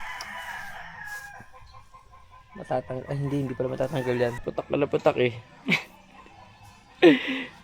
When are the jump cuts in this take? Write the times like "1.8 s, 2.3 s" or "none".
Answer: 4.4 s

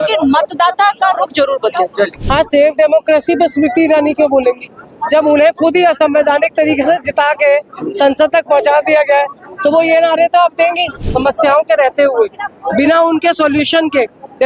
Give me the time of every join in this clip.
2.2 s, 11.0 s

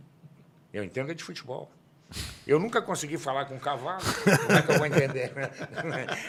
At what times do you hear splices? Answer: none

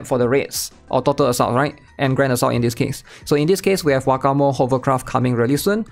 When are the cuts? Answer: none

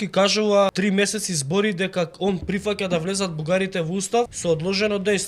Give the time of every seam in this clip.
0.7 s, 4.3 s

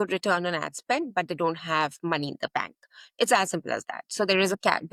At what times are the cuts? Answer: none

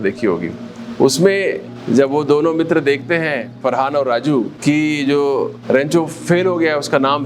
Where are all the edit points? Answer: 1.7 s, 3.5 s, 4.5 s, 5.6 s

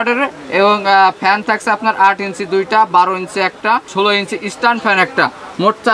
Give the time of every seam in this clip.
none

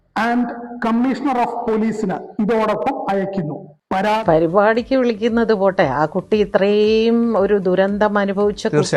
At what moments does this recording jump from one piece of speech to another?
4.2 s

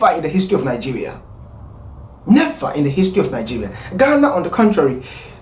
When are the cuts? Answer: none

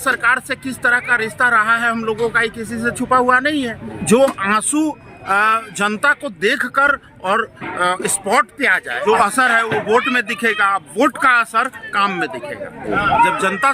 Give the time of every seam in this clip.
4.0 s, 9.0 s, 12.8 s

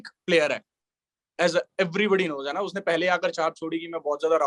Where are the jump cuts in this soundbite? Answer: none

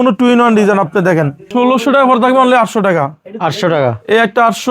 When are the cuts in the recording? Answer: 1.4 s

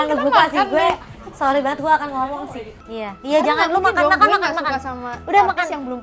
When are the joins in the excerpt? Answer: 2.8 s

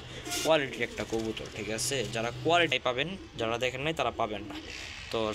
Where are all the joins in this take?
2.7 s

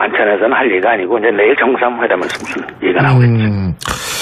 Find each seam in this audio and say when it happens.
2.0 s

